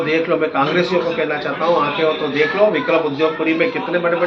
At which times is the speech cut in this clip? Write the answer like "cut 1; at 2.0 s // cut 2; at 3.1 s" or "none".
none